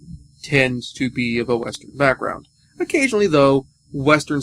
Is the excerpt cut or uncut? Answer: cut